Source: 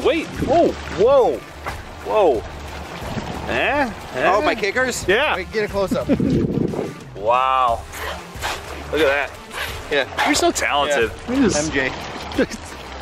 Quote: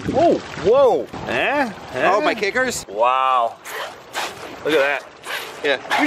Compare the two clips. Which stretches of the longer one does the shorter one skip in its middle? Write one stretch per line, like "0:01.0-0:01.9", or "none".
0:01.5-0:03.4
0:05.0-0:07.0